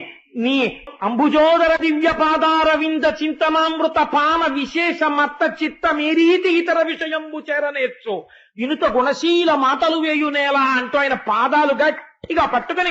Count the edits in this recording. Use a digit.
1